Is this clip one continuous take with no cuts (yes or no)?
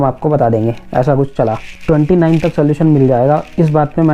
no